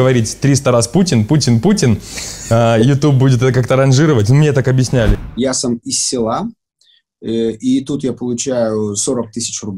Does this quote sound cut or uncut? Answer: cut